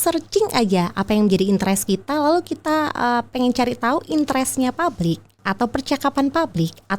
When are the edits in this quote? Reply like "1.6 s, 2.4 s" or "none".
5.3 s